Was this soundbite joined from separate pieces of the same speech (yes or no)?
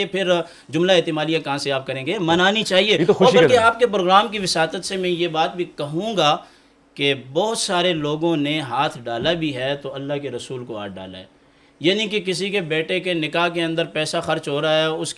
no